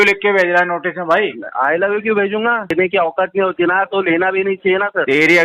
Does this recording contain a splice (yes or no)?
yes